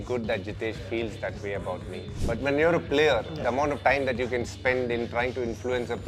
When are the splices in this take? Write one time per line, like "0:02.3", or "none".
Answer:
none